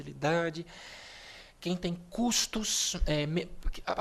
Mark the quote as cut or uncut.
uncut